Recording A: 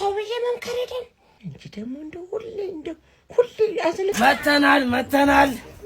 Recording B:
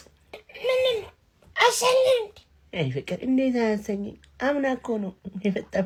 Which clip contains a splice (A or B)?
A